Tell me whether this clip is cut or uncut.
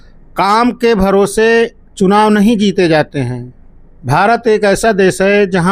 uncut